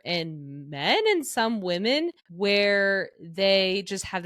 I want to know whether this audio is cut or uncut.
cut